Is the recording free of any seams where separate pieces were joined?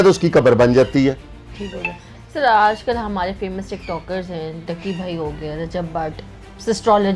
yes; 0 cuts

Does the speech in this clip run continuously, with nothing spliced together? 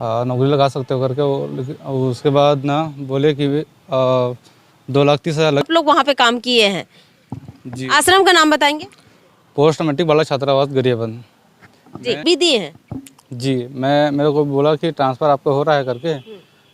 no; 2 cuts; at 5.6 s, 12.2 s

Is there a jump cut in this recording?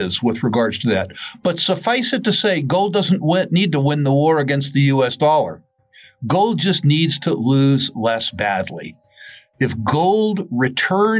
no; 0 cuts

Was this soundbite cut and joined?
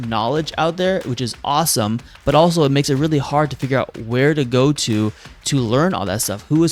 no; 0 cuts

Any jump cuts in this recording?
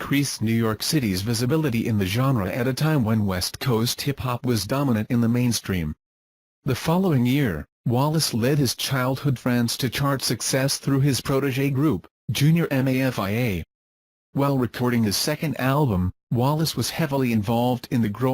yes; 1 cut; at 11.2 s

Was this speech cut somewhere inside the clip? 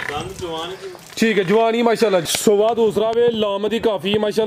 yes; 1 cut; at 2.3 s

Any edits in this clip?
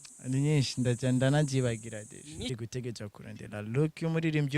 yes; 1 cut; at 2.5 s

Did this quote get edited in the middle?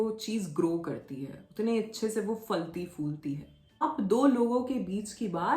yes; 1 cut; at 3.8 s

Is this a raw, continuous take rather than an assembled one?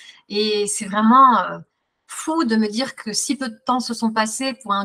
yes; 0 cuts

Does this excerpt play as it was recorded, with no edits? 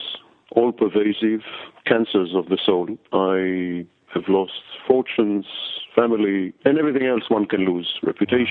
yes; 0 cuts

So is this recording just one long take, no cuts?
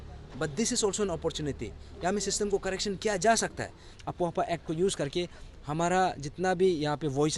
no; 1 cut; at 3.9 s

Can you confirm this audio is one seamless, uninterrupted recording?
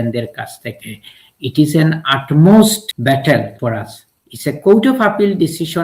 no; 2 cuts; at 2.9 s, 4.0 s

